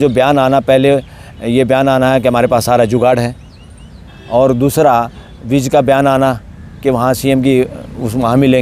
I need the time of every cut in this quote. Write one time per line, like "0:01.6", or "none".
none